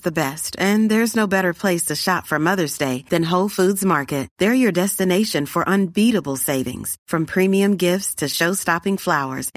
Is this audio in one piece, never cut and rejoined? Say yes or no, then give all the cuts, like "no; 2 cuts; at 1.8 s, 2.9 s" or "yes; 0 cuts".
yes; 0 cuts